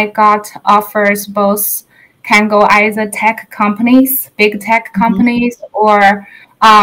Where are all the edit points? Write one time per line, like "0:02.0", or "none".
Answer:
none